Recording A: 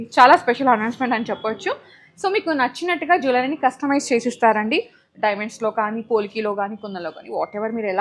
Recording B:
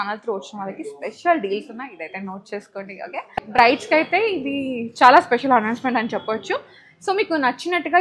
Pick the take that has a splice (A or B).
B